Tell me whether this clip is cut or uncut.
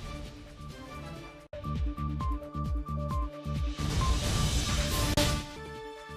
cut